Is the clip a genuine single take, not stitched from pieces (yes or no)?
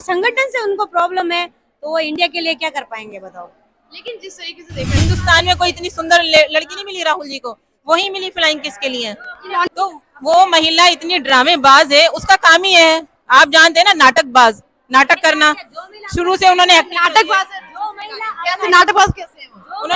no